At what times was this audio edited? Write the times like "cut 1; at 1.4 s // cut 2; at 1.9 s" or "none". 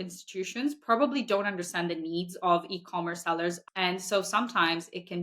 cut 1; at 3.6 s